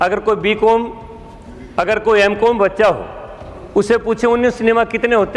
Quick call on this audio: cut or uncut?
uncut